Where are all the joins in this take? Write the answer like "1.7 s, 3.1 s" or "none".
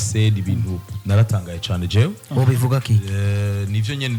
none